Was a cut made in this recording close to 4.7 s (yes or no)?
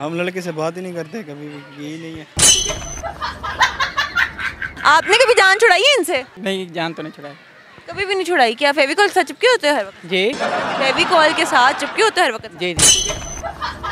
yes